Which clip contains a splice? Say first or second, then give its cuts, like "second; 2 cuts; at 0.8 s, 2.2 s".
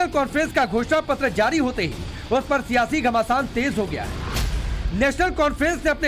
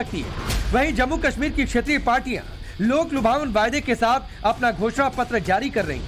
first; 1 cut; at 3.4 s